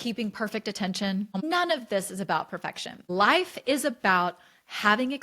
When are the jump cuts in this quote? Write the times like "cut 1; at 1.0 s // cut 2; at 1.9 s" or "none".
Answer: cut 1; at 1.4 s // cut 2; at 2.9 s